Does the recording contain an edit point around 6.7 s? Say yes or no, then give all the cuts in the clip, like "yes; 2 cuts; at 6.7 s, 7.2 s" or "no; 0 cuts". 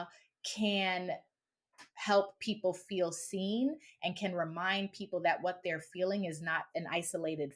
yes; 1 cut; at 6.7 s